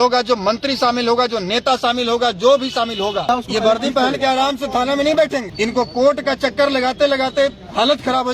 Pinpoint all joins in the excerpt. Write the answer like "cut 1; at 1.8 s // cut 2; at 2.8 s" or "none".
cut 1; at 3.3 s // cut 2; at 5.5 s